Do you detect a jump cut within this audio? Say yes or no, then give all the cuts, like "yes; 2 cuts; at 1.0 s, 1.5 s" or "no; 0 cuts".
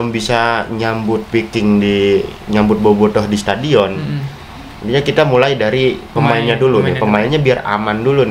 no; 0 cuts